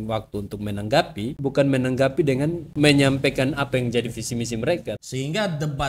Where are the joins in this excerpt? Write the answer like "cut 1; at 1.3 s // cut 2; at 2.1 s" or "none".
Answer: cut 1; at 1.4 s // cut 2; at 2.6 s // cut 3; at 5.0 s